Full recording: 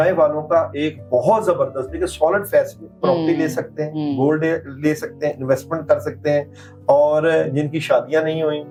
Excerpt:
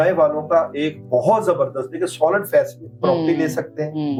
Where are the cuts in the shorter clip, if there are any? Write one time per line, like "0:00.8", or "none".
none